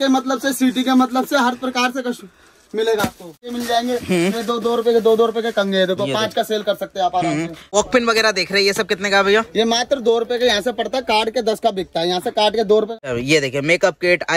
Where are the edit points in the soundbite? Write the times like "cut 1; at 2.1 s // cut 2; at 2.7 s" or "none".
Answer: cut 1; at 3.5 s // cut 2; at 7.7 s // cut 3; at 13.0 s